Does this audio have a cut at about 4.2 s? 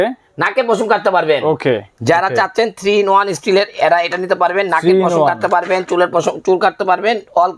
no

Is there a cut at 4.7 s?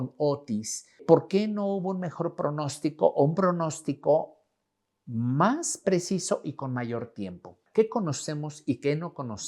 no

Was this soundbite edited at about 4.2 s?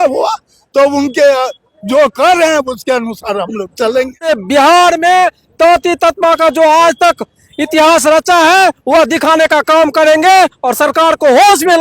yes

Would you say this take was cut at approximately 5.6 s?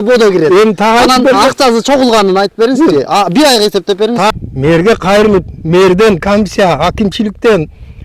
no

